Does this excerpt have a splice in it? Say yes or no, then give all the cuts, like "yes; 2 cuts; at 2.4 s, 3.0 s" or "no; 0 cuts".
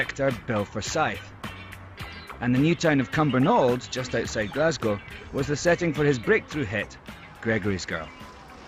yes; 1 cut; at 3.9 s